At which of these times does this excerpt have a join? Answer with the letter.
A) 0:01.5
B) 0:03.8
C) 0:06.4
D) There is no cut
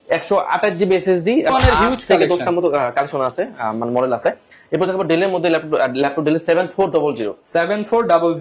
A